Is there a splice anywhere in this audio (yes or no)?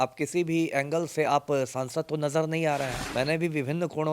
yes